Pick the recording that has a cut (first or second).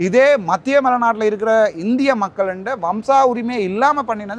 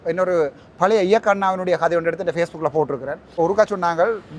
second